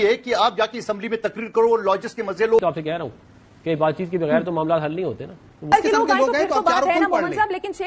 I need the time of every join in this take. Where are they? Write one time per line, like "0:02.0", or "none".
0:02.6
0:05.6